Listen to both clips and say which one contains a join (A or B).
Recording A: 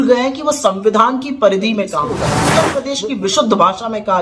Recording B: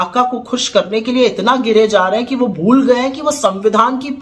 A